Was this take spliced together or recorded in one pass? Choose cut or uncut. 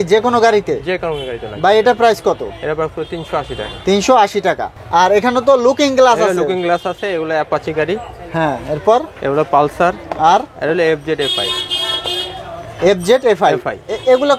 uncut